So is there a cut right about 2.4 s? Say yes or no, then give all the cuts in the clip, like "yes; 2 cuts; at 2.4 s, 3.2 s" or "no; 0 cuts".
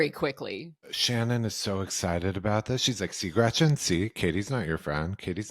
no; 1 cut; at 0.9 s